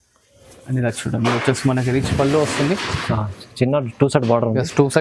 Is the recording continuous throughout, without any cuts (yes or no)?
yes